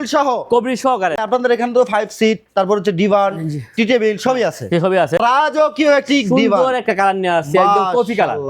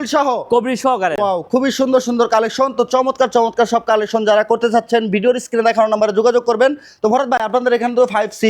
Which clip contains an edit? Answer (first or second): first